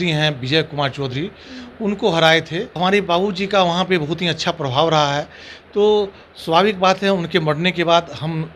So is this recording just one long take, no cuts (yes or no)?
no